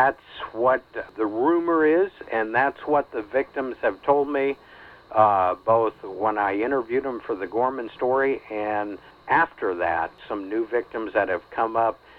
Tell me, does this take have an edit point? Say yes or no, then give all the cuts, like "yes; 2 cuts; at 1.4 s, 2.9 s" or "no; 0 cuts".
yes; 3 cuts; at 1.0 s, 9.2 s, 10.2 s